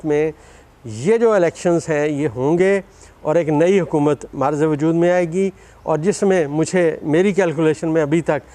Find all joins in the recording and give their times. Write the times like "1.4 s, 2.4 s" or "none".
none

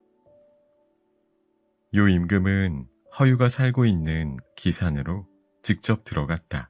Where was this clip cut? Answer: 1.8 s

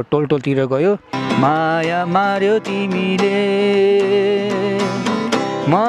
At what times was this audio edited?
1.2 s

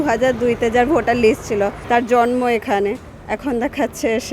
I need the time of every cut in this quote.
1.8 s

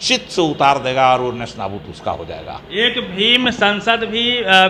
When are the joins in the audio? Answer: none

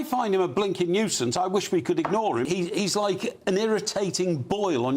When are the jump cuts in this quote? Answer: 2.5 s

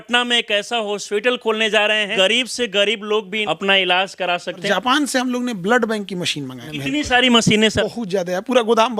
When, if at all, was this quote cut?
1.0 s, 2.1 s, 3.4 s, 4.6 s, 6.6 s, 7.8 s

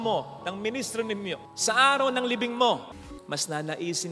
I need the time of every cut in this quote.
3.0 s

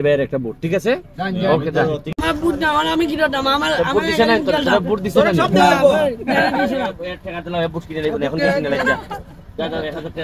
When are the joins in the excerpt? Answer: 2.1 s

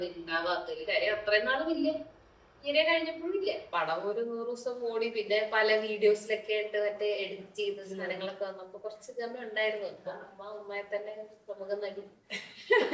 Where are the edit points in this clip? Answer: 3.7 s

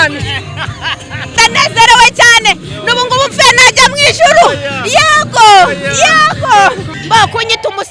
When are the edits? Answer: 1.3 s, 6.8 s

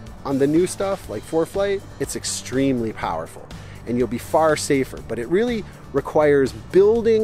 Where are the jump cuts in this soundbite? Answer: 1.9 s

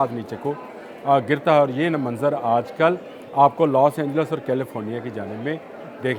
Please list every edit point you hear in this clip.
none

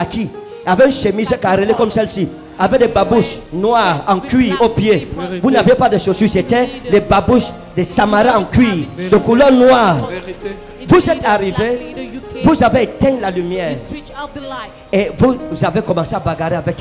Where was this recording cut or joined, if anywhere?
none

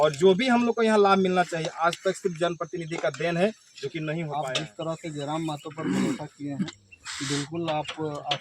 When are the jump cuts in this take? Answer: 4.3 s

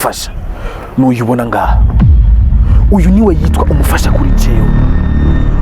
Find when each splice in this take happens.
4.5 s

